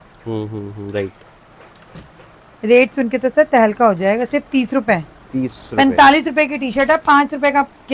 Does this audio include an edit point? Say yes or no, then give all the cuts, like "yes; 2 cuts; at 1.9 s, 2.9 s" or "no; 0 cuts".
yes; 1 cut; at 5.6 s